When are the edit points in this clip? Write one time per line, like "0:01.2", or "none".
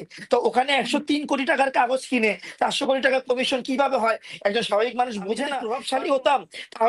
0:05.6